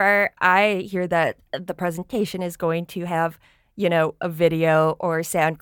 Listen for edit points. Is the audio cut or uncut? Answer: uncut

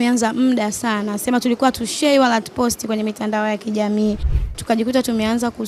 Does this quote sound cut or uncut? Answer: cut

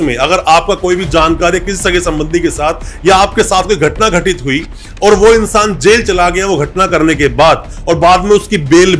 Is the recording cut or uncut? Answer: uncut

